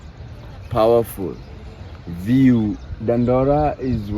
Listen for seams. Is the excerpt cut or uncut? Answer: cut